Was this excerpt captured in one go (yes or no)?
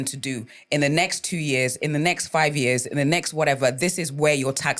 yes